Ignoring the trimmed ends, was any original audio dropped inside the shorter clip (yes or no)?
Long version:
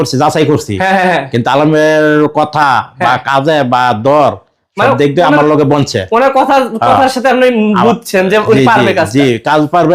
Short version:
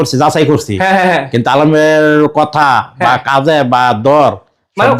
no